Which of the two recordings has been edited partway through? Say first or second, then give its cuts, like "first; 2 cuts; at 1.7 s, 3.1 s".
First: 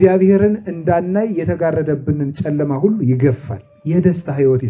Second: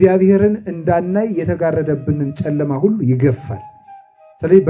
first; 1 cut; at 3.8 s